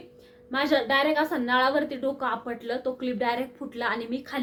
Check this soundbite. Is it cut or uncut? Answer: uncut